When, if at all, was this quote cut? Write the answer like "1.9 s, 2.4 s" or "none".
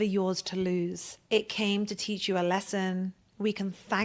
1.1 s